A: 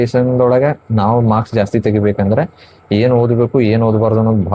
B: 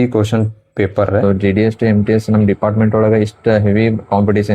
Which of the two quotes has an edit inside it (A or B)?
B